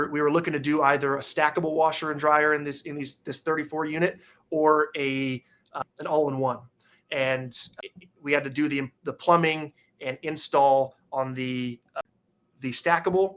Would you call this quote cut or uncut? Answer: cut